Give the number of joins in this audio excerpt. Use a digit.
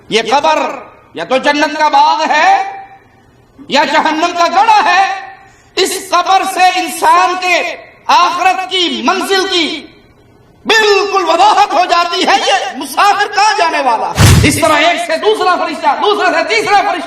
1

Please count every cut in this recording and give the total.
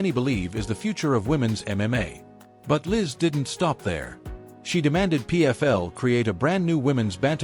1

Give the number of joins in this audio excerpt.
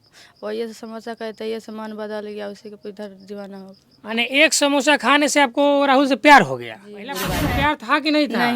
1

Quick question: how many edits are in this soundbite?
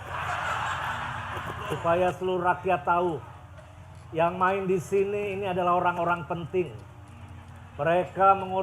1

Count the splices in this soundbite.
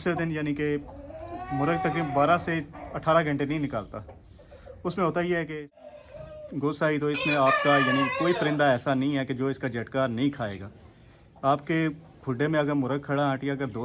1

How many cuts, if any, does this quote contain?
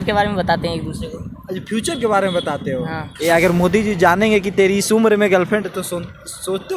1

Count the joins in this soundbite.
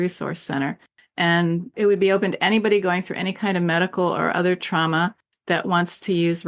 1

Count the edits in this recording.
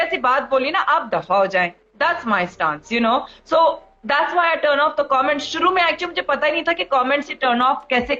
0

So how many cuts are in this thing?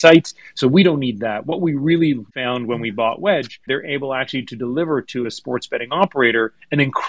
2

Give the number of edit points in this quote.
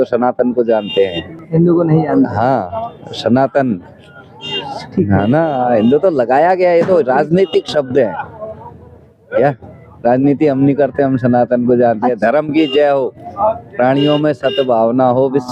0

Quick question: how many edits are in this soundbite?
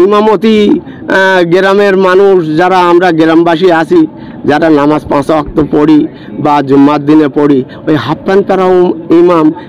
0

